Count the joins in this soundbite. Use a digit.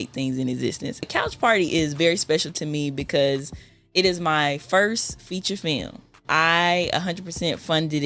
2